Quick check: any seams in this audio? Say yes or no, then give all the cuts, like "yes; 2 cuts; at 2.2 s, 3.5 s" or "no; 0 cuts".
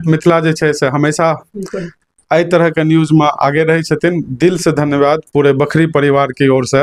no; 0 cuts